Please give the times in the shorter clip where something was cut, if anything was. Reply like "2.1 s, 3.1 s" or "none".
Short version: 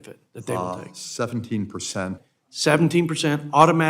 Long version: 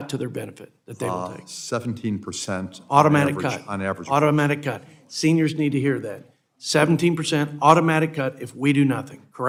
2.2 s

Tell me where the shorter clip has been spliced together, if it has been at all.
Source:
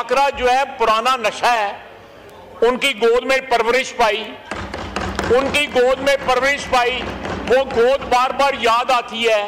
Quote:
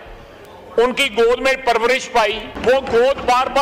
2.5 s

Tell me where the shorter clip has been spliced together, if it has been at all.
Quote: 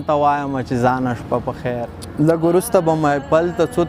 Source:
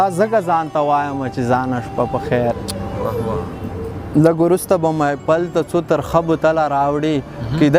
2.0 s

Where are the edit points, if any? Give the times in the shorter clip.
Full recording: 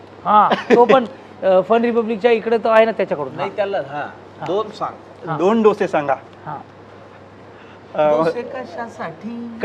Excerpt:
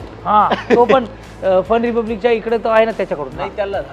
none

